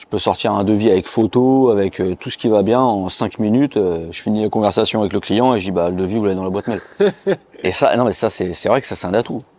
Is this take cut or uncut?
uncut